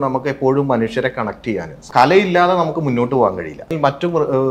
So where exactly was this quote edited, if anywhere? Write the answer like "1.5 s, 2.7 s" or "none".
1.8 s, 3.7 s